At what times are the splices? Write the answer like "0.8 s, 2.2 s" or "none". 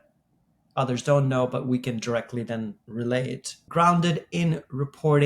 3.4 s

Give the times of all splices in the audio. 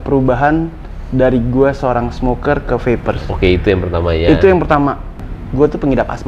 5.1 s

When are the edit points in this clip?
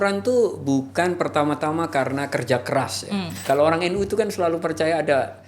3.4 s

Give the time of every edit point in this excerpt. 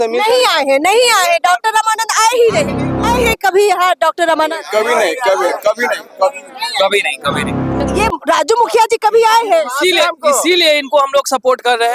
3.0 s, 7.9 s

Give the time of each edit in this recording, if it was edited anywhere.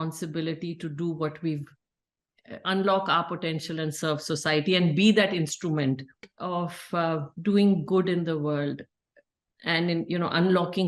6.3 s

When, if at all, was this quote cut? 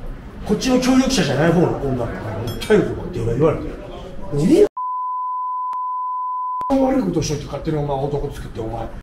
none

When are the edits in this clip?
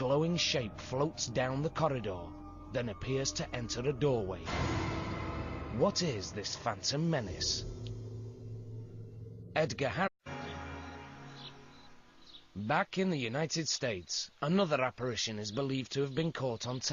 none

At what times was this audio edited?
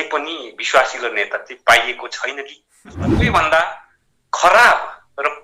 3.1 s

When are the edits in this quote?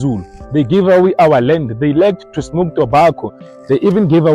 3.4 s

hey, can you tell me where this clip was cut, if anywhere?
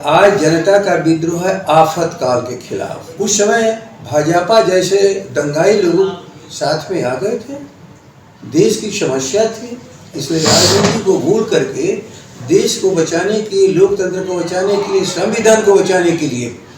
3.0 s

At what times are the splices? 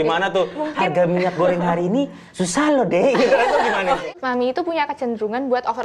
4.1 s

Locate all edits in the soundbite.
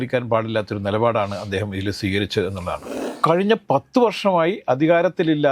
3.0 s

